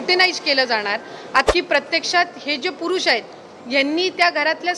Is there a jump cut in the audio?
yes; 1 cut; at 1.4 s

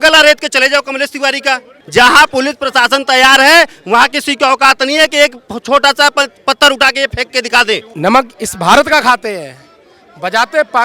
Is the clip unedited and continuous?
no; 2 cuts; at 1.7 s, 7.9 s

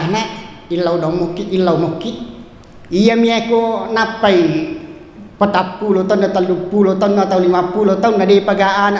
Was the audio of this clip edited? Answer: no; 0 cuts

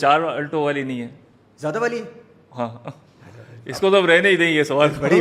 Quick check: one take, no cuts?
yes; 0 cuts

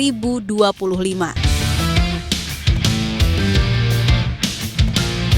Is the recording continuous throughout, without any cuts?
no; 1 cut; at 1.5 s

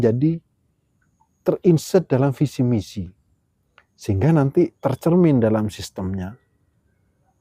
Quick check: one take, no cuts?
no; 1 cut; at 4.8 s

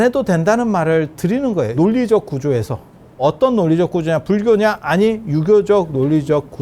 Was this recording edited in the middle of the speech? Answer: yes; 2 cuts; at 1.7 s, 3.2 s

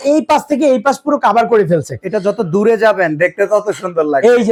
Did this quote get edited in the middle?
no; 0 cuts

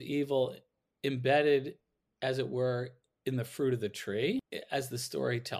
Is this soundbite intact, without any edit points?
no; 1 cut; at 4.5 s

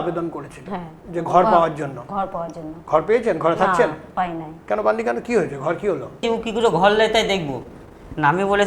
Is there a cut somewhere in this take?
yes; 1 cut; at 6.2 s

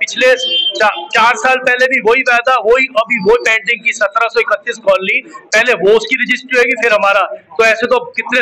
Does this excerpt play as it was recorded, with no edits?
yes; 0 cuts

